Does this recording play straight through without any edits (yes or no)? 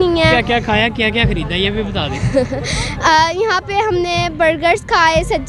yes